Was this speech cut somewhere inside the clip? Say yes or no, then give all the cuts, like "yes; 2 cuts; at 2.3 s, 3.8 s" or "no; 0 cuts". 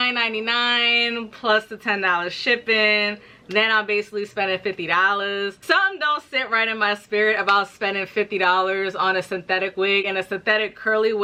no; 0 cuts